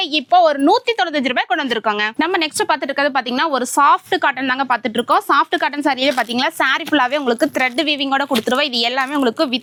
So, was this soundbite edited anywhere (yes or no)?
no